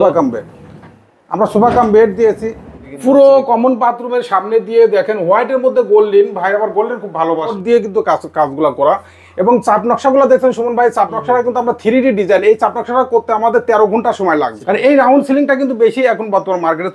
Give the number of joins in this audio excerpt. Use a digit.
3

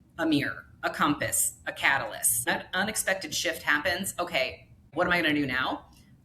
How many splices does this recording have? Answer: 2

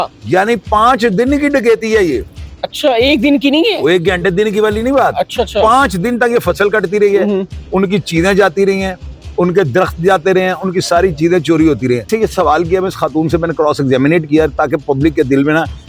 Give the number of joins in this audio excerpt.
1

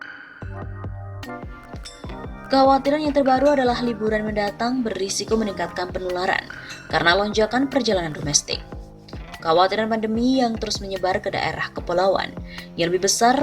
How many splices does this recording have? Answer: 1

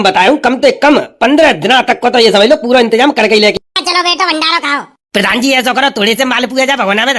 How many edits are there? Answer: 1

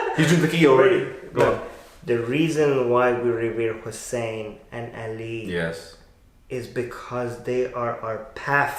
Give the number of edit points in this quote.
0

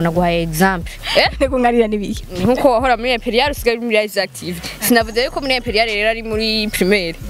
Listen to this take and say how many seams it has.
1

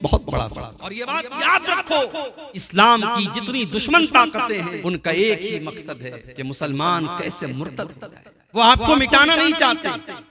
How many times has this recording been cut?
4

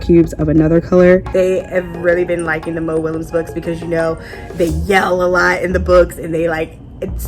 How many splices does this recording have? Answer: 1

